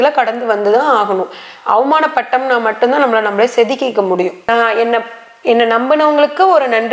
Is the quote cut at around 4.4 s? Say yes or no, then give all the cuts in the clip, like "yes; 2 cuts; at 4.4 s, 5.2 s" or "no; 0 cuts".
yes; 1 cut; at 4.4 s